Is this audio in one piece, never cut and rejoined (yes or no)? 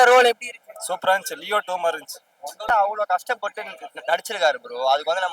no